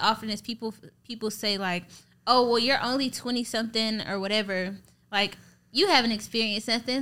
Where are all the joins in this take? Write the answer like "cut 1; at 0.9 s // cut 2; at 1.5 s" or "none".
none